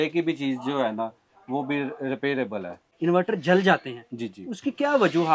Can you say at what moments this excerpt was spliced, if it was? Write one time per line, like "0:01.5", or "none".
0:02.9